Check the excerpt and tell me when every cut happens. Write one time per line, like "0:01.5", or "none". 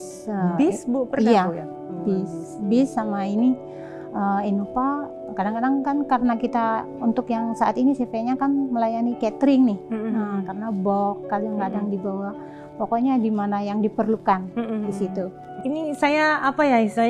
0:15.5